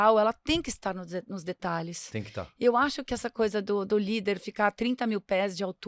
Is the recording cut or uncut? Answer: uncut